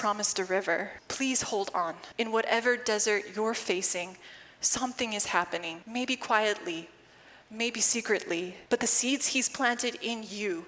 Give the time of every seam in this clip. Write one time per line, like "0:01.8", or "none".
0:01.0
0:02.0
0:05.8
0:08.6